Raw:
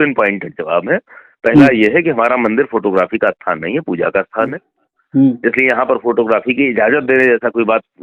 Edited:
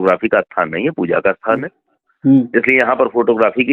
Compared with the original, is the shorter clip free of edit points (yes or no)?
yes